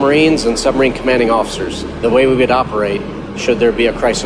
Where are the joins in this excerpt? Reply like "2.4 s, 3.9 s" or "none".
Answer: 1.9 s